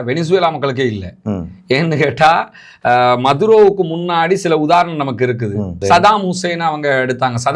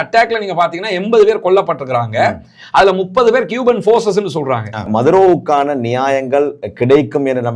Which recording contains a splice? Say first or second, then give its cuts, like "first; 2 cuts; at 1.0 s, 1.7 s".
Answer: second; 1 cut; at 4.8 s